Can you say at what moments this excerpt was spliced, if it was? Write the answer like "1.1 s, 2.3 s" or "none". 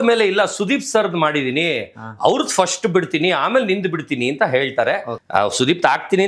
5.1 s